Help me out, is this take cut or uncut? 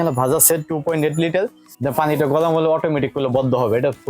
cut